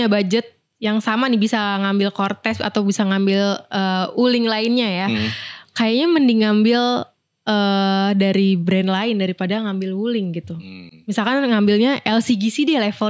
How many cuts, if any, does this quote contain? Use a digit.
0